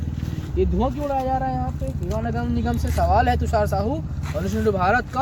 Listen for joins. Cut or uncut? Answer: uncut